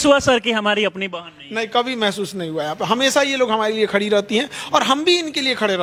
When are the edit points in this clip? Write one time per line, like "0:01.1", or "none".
none

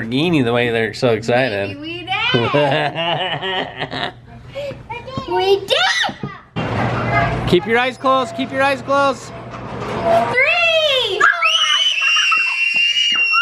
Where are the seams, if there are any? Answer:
0:06.5
0:10.3

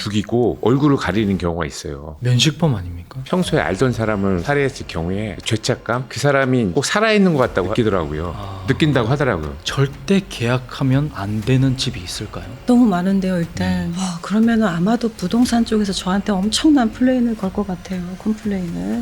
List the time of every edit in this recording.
0:03.2
0:07.7
0:09.6
0:13.9

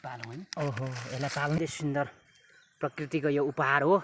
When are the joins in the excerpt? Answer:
0:01.6

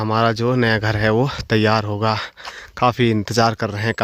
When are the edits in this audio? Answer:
none

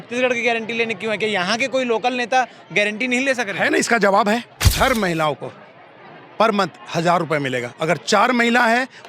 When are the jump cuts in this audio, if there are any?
0:04.7

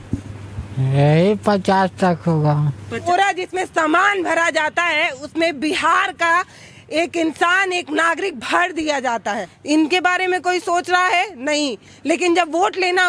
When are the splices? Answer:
0:03.0
0:09.5

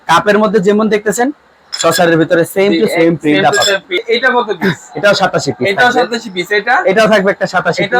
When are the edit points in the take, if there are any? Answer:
0:04.0

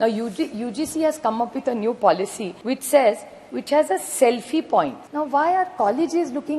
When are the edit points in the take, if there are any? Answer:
0:02.5
0:05.0

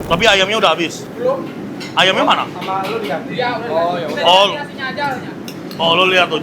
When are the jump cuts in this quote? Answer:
0:01.0

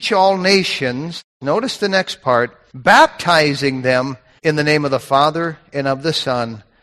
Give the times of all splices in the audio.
0:01.2
0:02.6
0:04.2

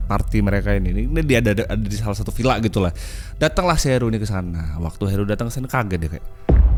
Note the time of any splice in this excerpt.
none

